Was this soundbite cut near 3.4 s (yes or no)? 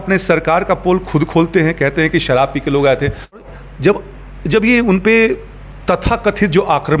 yes